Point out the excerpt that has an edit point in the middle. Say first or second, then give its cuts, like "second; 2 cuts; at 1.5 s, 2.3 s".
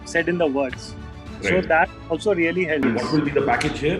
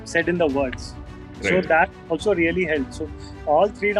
first; 1 cut; at 2.8 s